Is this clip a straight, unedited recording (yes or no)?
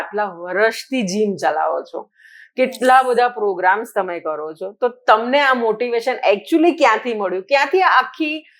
yes